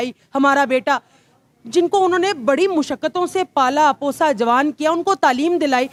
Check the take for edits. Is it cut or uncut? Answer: uncut